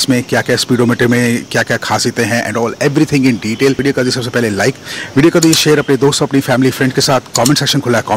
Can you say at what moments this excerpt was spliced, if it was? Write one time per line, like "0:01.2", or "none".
0:03.8